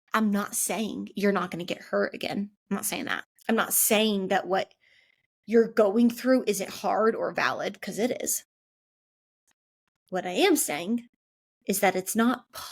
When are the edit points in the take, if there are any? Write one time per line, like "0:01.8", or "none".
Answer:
0:03.3